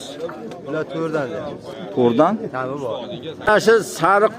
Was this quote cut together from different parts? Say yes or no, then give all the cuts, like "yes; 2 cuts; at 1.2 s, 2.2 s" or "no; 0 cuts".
yes; 1 cut; at 3.5 s